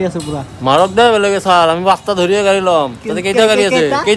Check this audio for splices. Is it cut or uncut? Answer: uncut